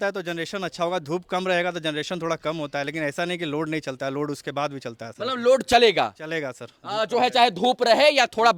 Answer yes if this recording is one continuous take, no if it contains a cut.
yes